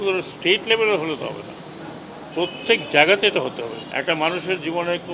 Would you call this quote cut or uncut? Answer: cut